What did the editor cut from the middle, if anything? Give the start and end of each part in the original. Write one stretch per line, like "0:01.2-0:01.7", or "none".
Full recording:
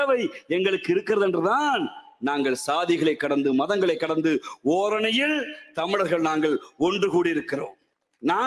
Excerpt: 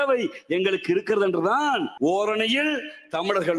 0:01.9-0:04.5